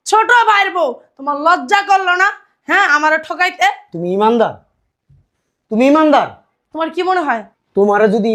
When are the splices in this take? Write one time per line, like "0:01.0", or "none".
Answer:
none